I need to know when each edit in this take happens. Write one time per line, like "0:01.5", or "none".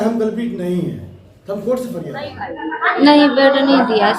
0:02.5